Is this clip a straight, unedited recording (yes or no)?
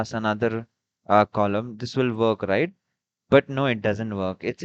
yes